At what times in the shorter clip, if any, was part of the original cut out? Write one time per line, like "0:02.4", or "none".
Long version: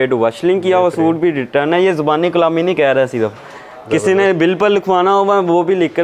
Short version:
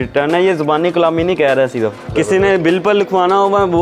0:02.0